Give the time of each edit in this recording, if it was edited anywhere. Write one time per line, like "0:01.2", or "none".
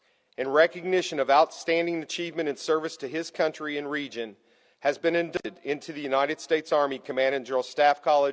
0:05.3